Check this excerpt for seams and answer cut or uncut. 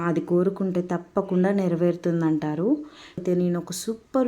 cut